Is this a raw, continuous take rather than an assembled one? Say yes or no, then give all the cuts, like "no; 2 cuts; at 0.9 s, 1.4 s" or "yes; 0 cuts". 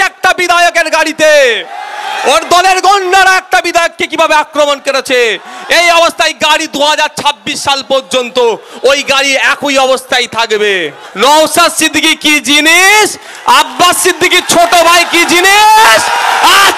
no; 1 cut; at 11.0 s